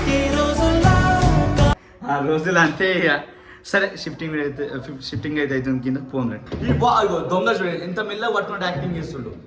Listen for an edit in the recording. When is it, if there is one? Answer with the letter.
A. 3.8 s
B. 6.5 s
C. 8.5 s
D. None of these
B